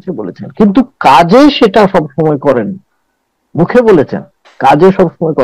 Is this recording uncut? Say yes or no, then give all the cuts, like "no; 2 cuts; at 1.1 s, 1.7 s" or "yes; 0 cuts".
yes; 0 cuts